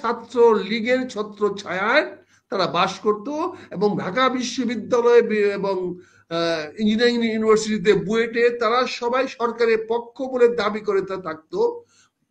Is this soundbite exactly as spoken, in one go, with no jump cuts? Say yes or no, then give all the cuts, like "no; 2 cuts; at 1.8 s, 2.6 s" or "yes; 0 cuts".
yes; 0 cuts